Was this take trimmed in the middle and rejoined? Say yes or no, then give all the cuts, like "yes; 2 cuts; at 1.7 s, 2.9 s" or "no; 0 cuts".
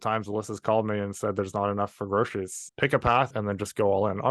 yes; 2 cuts; at 2.6 s, 3.3 s